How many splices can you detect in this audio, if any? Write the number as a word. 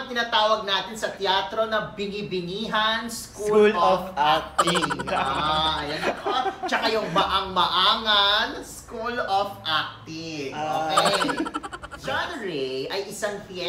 one